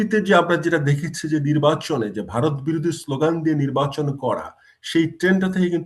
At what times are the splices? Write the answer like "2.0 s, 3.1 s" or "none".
none